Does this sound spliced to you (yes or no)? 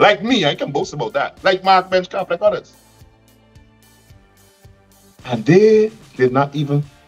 no